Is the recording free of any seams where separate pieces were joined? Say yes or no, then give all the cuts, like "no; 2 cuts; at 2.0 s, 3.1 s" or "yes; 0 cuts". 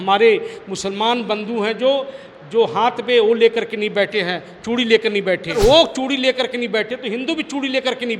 no; 1 cut; at 5.6 s